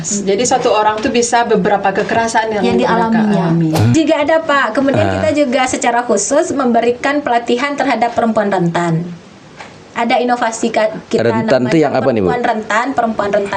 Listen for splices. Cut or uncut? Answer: cut